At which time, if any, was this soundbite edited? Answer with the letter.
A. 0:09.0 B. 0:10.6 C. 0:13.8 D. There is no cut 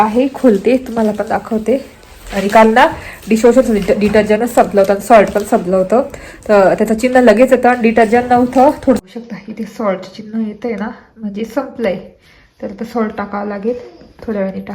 A